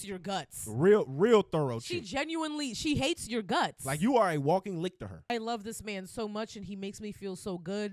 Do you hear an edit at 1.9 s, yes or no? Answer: no